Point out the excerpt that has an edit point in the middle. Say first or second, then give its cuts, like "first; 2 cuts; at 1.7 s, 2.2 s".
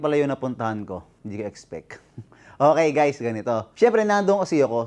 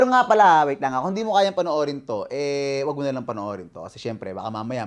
first; 2 cuts; at 1.1 s, 3.6 s